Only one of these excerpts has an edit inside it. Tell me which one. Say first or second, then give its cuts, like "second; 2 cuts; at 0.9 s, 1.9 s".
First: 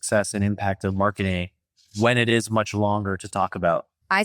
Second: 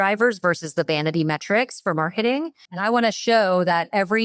second; 1 cut; at 2.6 s